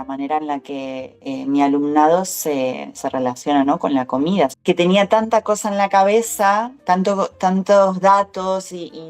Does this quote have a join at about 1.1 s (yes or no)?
yes